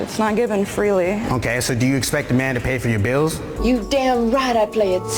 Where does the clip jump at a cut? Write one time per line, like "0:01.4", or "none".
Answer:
none